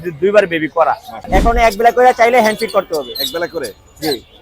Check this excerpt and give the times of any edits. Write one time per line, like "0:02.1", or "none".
0:01.1